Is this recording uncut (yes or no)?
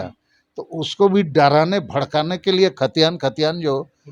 yes